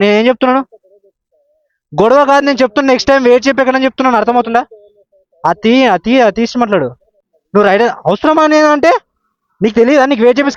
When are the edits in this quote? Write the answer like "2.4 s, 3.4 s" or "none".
none